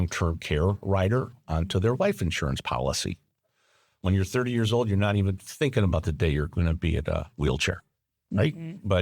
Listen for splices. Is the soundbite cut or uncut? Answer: uncut